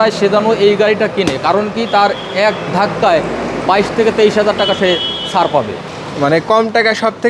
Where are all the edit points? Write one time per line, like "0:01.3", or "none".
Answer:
0:05.9